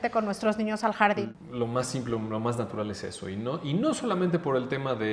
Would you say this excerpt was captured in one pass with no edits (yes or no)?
no